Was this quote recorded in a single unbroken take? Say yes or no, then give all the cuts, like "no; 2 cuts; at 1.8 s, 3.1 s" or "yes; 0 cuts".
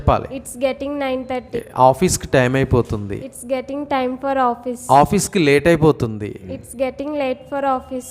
no; 3 cuts; at 1.6 s, 3.3 s, 6.6 s